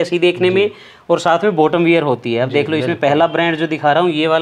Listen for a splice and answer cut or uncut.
uncut